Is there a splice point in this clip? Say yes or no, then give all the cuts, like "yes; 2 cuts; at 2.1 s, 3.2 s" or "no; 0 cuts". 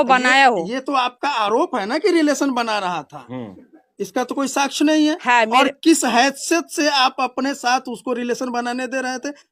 no; 0 cuts